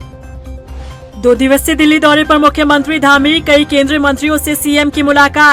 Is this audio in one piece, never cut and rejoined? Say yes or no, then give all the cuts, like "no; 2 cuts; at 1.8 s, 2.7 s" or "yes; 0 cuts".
no; 1 cut; at 1.0 s